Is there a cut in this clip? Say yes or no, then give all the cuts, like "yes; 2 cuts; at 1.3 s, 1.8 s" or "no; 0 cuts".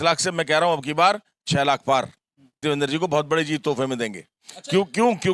yes; 1 cut; at 2.6 s